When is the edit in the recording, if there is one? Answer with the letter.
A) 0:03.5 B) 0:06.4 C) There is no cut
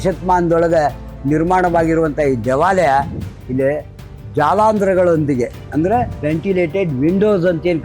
C